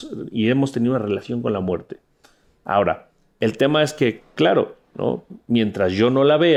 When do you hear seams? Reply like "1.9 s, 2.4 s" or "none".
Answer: none